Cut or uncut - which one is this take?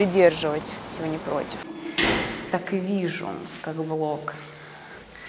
cut